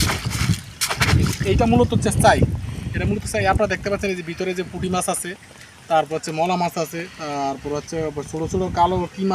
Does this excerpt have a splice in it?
no; 0 cuts

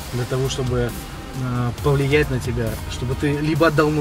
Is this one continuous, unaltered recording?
yes; 0 cuts

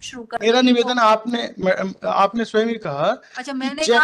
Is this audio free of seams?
yes; 0 cuts

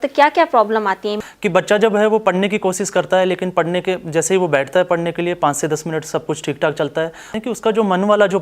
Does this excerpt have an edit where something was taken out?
yes; 2 cuts; at 1.2 s, 7.3 s

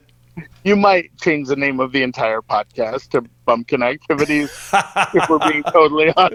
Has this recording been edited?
no; 0 cuts

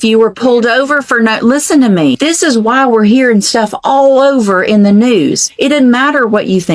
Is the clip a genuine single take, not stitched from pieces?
no; 2 cuts; at 2.2 s, 5.5 s

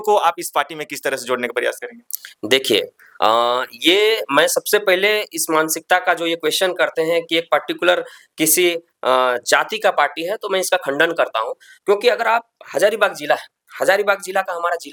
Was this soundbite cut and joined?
no; 0 cuts

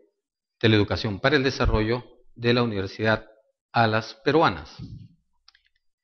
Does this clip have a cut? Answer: no; 0 cuts

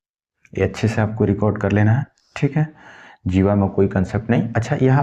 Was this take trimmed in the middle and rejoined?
no; 0 cuts

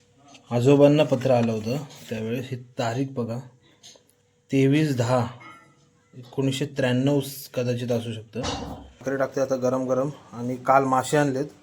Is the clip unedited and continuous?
no; 1 cut; at 9.0 s

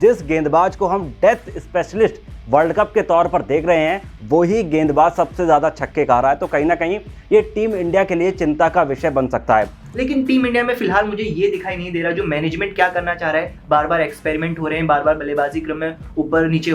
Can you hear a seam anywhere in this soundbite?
yes; 1 cut; at 9.8 s

